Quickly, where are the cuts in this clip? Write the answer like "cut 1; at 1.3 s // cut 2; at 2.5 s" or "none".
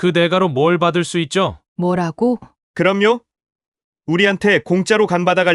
cut 1; at 1.6 s // cut 2; at 2.5 s